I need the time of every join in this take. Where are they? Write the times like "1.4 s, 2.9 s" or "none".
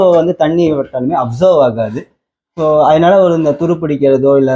none